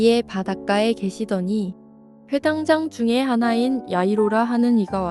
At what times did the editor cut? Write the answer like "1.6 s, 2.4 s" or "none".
2.1 s